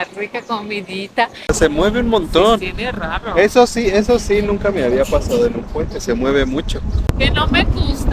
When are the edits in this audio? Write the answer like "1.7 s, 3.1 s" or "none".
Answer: 1.5 s, 7.0 s